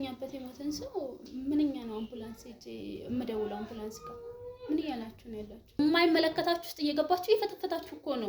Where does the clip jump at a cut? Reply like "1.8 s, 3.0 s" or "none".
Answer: 5.8 s

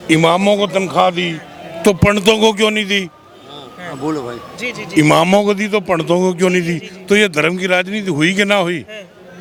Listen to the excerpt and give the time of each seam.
none

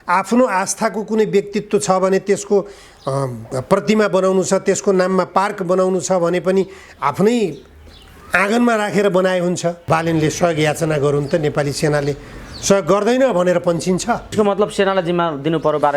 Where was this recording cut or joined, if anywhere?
9.8 s, 14.3 s

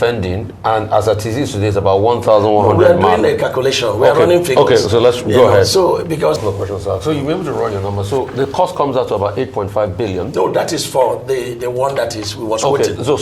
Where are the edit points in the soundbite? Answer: 6.4 s

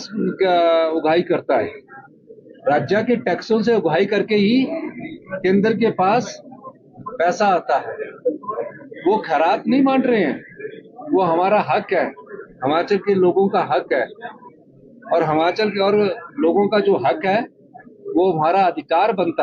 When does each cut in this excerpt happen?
none

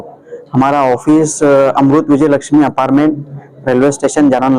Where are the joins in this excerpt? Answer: none

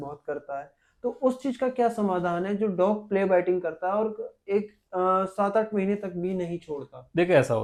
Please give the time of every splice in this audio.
none

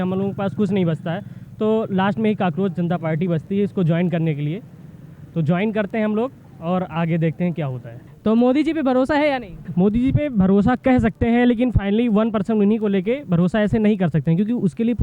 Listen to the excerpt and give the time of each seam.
none

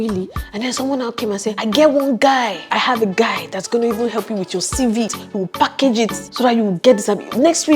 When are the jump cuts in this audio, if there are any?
1.6 s, 2.7 s, 5.2 s

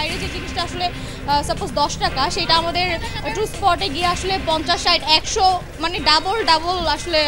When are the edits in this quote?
none

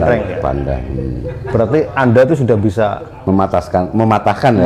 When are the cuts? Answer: none

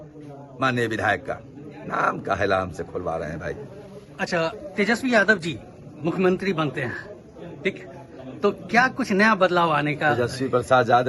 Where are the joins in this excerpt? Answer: none

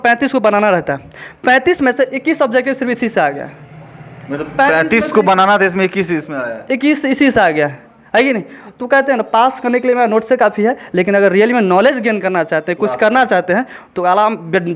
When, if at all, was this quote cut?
none

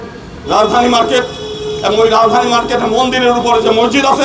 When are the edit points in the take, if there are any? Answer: none

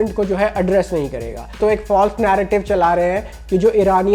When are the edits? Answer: 1.6 s

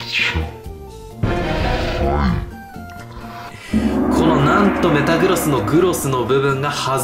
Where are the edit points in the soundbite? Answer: none

